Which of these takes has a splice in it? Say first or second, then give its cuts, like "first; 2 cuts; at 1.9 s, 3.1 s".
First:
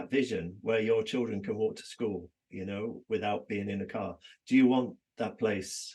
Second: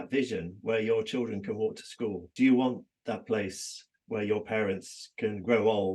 second; 1 cut; at 2.2 s